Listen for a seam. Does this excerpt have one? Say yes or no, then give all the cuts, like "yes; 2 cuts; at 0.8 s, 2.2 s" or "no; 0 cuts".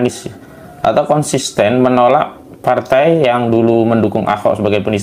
no; 0 cuts